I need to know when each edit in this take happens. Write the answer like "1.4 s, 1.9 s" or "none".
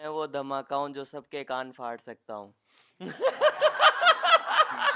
none